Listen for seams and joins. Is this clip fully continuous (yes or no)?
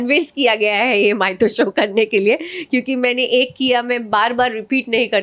yes